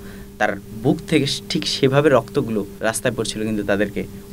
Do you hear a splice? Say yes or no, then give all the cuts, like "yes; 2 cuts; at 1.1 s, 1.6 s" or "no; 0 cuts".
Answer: yes; 1 cut; at 2.7 s